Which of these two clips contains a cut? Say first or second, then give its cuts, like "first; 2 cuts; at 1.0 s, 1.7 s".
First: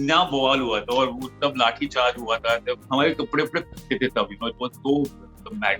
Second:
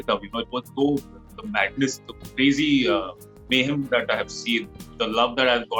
first; 1 cut; at 2.8 s